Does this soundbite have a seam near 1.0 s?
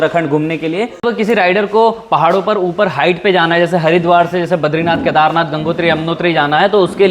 yes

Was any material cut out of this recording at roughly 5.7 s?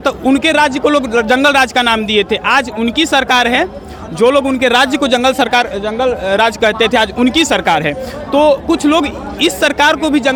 no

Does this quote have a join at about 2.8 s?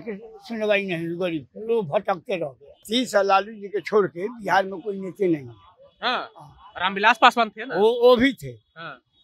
yes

